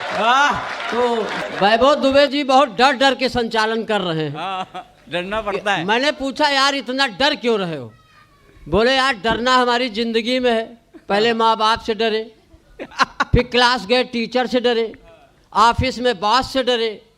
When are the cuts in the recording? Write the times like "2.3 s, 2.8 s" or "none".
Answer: 1.4 s